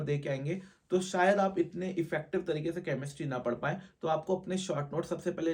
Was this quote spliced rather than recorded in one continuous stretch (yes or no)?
no